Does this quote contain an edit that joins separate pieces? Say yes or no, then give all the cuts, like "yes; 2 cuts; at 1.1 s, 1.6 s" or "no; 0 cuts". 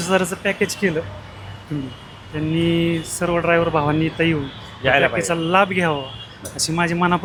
no; 0 cuts